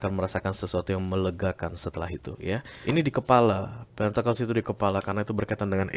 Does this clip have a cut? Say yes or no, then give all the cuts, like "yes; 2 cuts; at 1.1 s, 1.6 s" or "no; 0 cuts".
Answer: yes; 1 cut; at 2.7 s